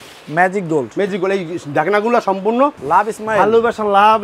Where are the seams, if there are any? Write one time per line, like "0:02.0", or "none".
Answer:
0:02.8